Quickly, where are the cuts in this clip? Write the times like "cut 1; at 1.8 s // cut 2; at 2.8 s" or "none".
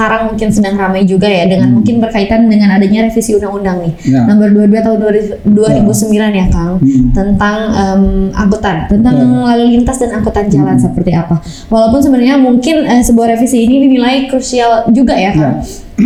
none